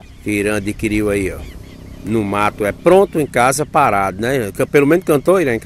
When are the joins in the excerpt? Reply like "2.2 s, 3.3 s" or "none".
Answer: none

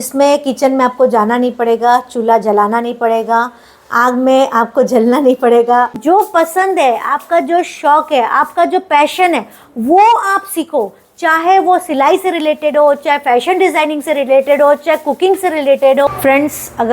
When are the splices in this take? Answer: 6.0 s, 16.1 s

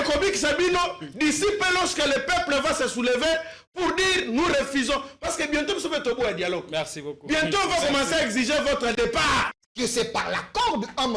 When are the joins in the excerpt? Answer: 9.5 s

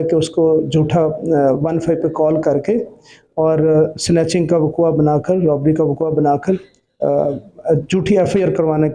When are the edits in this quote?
none

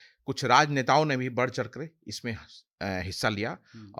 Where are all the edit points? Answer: none

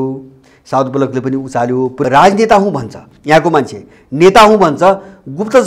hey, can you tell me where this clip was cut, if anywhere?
2.0 s

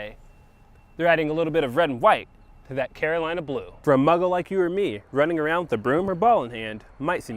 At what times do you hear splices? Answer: 3.7 s

